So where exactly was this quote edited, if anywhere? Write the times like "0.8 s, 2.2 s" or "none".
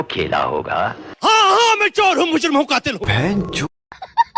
3.0 s